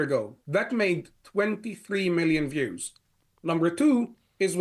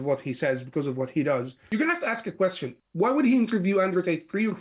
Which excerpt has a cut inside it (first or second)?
second